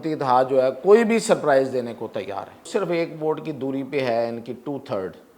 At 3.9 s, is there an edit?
no; 1 cut; at 2.5 s

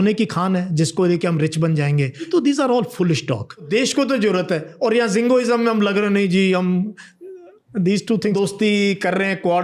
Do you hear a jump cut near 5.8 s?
no; 3 cuts; at 2.2 s, 3.7 s, 8.3 s

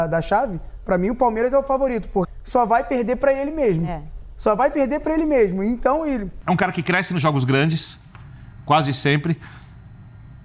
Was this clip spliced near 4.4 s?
no; 2 cuts; at 2.3 s, 6.3 s

